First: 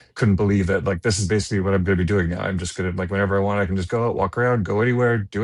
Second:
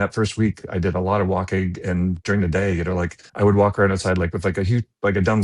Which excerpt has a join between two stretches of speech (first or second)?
second